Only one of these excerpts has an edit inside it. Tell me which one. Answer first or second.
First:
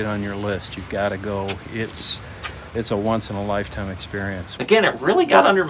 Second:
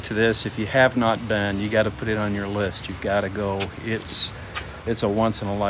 first